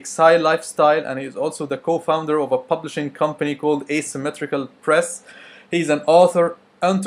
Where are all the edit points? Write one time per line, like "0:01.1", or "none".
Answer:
0:01.1